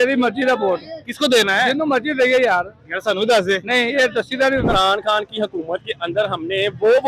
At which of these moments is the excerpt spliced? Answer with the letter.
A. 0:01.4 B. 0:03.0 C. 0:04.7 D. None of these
C